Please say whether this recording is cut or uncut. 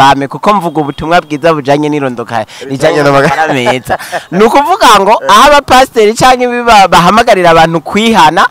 uncut